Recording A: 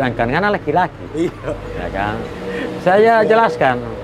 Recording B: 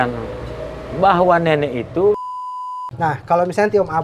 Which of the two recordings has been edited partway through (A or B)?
B